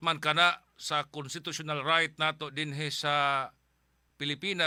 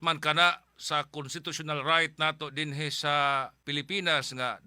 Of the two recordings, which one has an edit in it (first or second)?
second